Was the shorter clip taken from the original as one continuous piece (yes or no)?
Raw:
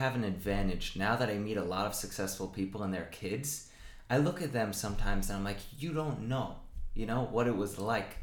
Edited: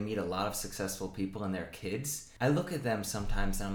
no